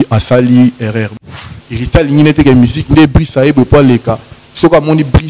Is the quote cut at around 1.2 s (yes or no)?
yes